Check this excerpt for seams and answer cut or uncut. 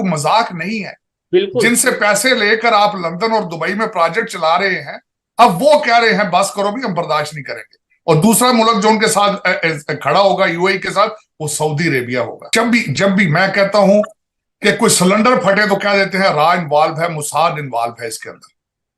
cut